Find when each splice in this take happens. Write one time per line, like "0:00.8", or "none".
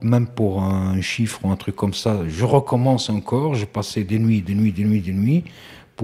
none

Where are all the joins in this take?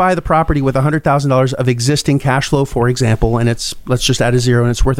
none

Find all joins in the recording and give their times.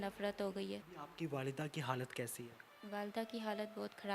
0:01.0

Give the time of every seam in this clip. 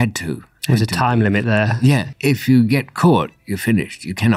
0:02.1

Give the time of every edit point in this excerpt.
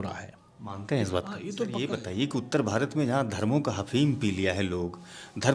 0:01.7

